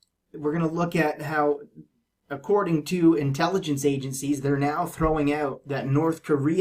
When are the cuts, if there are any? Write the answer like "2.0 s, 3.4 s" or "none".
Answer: 3.2 s